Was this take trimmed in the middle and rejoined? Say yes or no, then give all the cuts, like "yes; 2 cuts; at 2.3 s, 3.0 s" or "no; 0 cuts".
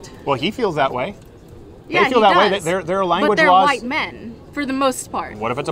no; 0 cuts